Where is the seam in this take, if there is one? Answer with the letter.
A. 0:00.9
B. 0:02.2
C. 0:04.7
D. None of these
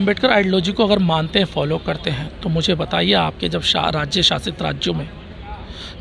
D